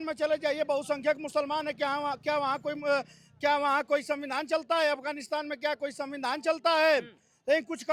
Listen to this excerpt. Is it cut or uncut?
uncut